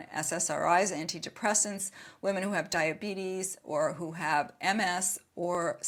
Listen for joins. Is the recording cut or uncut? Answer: uncut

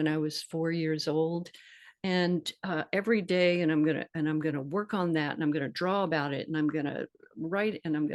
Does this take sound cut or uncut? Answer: uncut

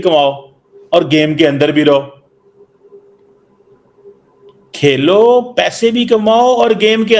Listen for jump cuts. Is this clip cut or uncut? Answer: uncut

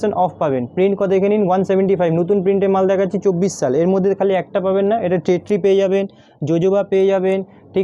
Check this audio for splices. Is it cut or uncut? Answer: uncut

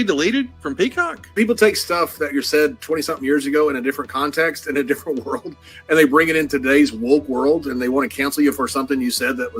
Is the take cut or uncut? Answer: cut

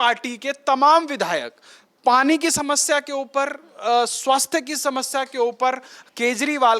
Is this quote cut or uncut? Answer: uncut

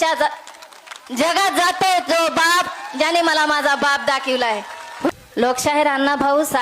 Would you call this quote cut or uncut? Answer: cut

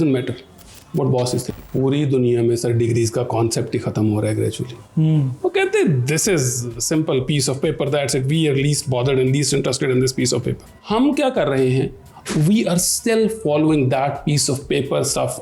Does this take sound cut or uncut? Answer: cut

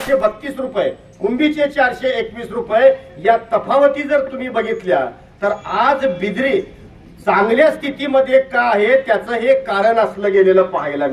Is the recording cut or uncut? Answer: uncut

